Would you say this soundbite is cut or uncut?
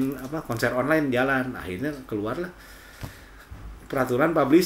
uncut